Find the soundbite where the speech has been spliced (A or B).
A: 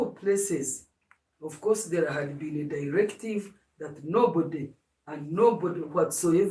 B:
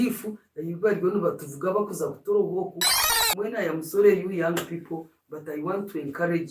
B